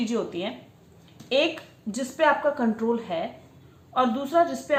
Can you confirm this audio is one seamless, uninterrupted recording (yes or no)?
yes